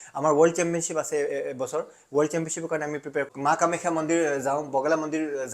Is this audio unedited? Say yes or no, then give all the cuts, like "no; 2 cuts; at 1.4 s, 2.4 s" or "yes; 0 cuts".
no; 1 cut; at 3.3 s